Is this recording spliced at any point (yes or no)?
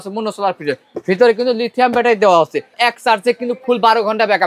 yes